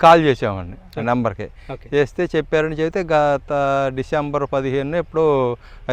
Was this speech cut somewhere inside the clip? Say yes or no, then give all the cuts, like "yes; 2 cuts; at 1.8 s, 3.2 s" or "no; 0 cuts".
no; 0 cuts